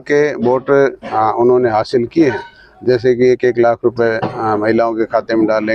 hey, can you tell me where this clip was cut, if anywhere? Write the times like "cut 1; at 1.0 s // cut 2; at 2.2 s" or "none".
none